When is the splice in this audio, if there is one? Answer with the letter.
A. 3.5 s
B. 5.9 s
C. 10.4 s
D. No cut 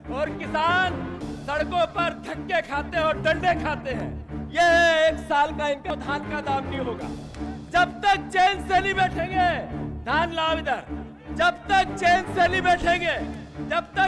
B